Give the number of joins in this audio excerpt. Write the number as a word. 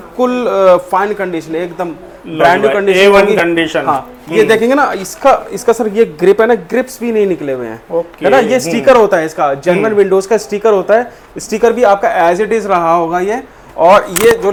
zero